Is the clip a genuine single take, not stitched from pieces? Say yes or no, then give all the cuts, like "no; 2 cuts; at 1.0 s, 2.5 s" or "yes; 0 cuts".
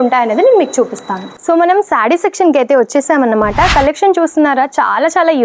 yes; 0 cuts